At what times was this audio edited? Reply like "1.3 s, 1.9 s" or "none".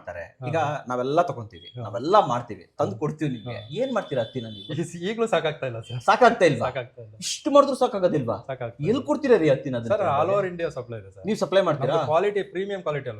none